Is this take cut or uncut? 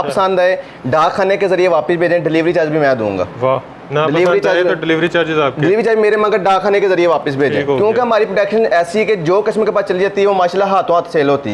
uncut